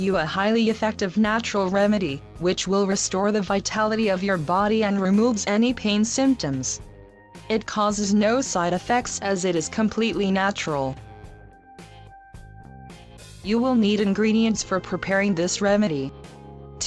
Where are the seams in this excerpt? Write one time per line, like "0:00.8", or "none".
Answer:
0:12.9